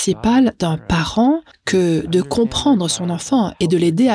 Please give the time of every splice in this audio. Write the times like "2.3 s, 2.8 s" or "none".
1.5 s